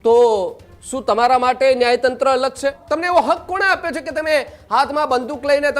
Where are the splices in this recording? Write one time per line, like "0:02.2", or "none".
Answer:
0:02.8

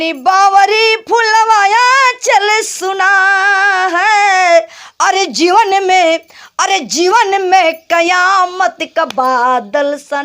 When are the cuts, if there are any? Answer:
none

